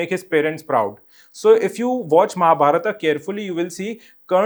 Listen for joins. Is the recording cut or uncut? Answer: uncut